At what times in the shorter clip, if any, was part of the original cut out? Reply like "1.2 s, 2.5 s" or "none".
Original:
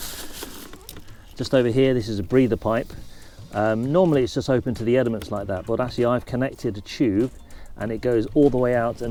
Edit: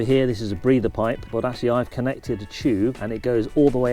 1.2 s, 3.0 s